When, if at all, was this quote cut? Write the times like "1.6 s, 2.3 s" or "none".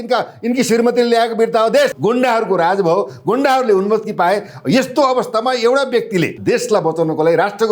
1.9 s, 6.4 s